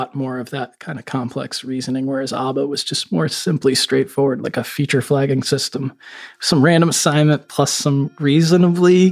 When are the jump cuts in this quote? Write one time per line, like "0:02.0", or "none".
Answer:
none

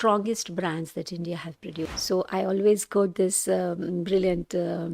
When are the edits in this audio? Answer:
0:01.9

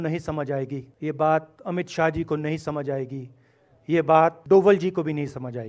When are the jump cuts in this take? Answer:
0:00.9
0:04.4

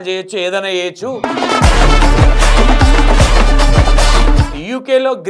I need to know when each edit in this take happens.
0:01.2
0:04.5

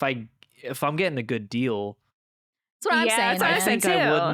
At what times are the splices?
none

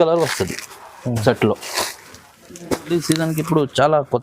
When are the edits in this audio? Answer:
0:02.9

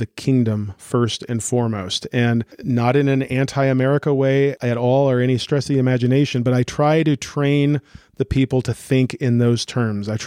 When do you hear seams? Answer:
0:02.5
0:04.6

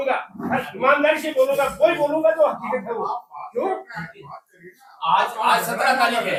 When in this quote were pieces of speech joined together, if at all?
none

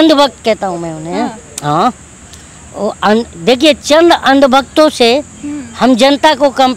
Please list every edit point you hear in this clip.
none

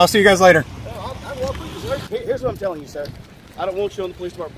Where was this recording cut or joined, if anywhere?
0:02.1

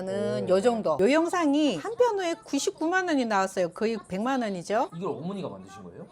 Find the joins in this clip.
0:01.0

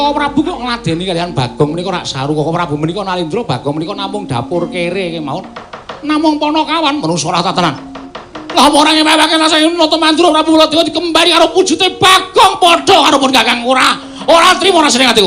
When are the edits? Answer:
none

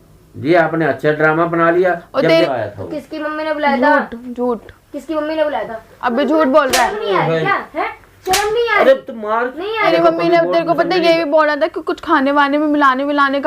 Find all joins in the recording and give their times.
0:02.5
0:09.8

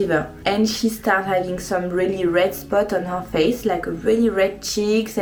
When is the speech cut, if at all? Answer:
none

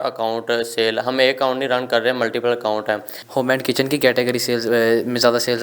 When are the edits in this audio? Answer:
0:03.1

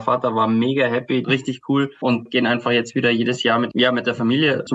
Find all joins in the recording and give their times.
0:01.2
0:02.3
0:03.7

